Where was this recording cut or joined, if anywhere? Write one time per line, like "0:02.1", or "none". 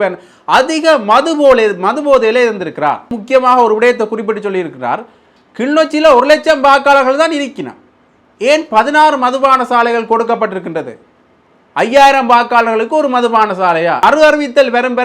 0:03.1
0:14.0